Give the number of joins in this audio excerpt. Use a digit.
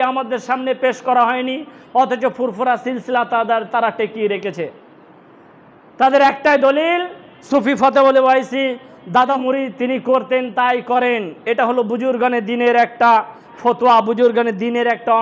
1